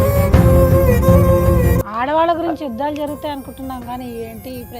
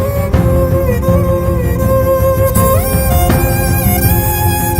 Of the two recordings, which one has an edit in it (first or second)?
first